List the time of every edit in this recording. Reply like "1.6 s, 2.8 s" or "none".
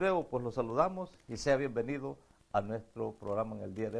1.7 s